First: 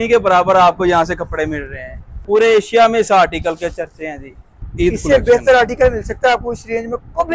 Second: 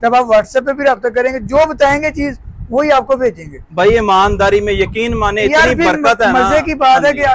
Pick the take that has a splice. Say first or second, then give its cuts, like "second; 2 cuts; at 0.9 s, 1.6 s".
first; 2 cuts; at 2.2 s, 4.5 s